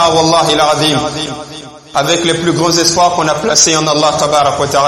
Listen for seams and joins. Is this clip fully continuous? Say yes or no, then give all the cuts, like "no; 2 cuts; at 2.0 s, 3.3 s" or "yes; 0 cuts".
yes; 0 cuts